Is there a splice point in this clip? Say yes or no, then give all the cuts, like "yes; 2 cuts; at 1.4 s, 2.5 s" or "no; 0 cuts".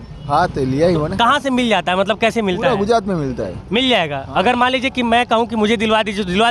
no; 0 cuts